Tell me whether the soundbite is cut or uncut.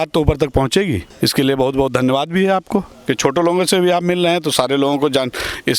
cut